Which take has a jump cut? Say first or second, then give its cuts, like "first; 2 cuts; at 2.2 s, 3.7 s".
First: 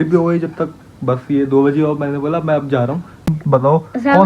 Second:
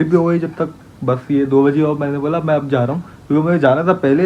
first; 1 cut; at 3.3 s